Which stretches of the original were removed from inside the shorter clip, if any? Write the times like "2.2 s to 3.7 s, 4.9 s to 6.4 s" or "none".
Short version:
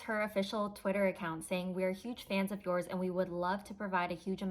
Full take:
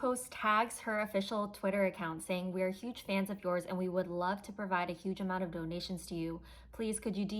none